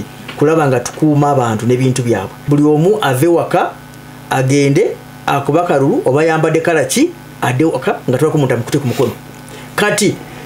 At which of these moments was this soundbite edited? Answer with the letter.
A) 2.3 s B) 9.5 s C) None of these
A